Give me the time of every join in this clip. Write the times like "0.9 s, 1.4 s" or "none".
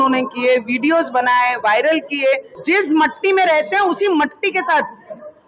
2.5 s